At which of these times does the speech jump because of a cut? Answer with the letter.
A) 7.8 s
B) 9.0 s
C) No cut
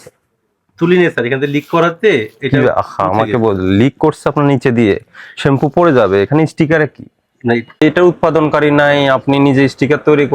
A